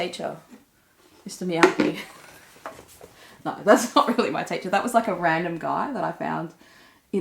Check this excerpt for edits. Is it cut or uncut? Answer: uncut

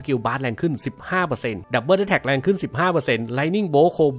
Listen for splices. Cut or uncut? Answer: cut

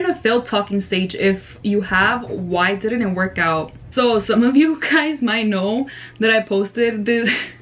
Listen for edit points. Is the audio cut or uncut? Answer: uncut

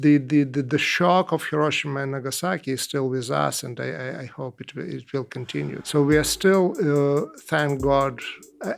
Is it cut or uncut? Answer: cut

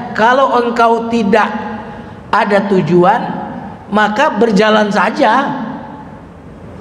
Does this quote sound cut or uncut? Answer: uncut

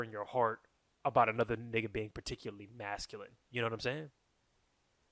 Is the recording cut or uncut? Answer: uncut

